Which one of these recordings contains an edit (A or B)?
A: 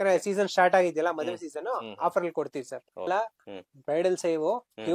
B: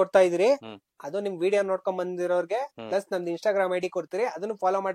A